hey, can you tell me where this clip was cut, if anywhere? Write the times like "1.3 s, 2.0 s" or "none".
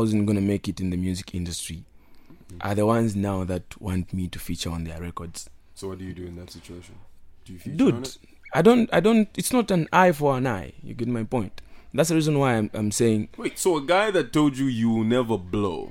none